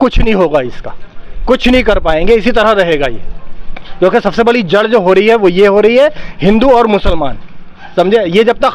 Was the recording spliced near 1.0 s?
no; 0 cuts

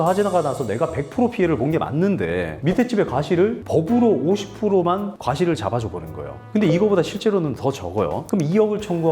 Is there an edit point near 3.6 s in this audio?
yes; 3 cuts; at 3.6 s, 6.4 s, 8.2 s

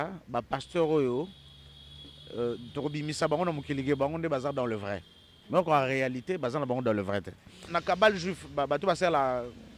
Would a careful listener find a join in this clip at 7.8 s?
yes; 1 cut; at 7.8 s

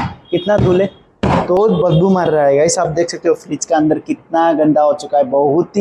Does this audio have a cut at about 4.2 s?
no; 1 cut; at 1.6 s

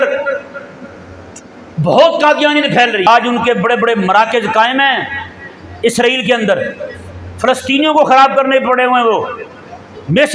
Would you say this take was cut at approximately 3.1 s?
yes; 1 cut; at 3.1 s

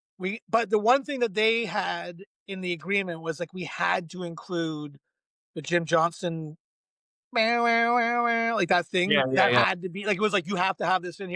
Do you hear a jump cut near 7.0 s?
no; 0 cuts

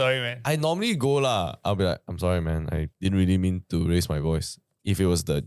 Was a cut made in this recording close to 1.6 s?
no; 1 cut; at 2.9 s

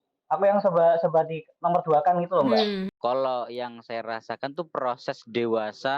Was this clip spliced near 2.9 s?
yes; 1 cut; at 2.9 s

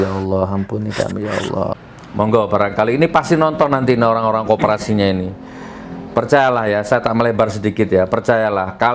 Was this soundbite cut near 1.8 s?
yes; 1 cut; at 1.8 s

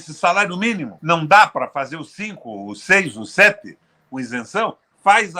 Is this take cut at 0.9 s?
yes; 1 cut; at 0.9 s

